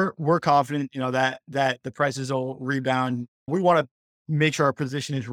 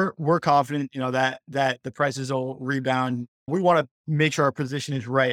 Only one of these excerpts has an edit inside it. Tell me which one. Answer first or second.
second